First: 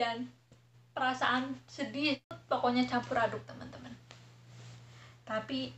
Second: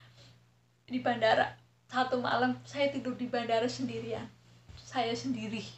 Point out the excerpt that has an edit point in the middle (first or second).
first